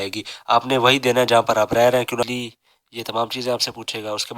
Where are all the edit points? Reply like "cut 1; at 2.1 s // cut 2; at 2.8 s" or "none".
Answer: cut 1; at 2.3 s